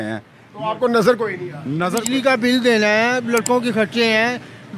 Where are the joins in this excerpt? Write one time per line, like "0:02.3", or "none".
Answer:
0:01.9